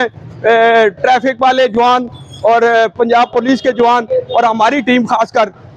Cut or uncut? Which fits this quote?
uncut